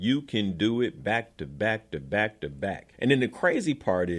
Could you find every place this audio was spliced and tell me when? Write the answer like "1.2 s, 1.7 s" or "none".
2.9 s